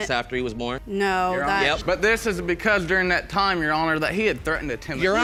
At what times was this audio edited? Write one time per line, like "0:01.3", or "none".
none